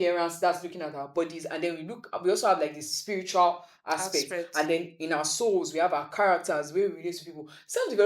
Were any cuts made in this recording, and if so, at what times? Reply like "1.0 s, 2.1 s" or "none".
none